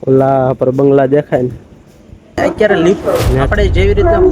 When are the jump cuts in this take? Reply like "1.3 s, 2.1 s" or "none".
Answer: 2.4 s